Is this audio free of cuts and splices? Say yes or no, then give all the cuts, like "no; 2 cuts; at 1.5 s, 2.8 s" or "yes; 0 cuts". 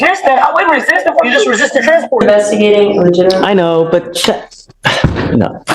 no; 1 cut; at 2.2 s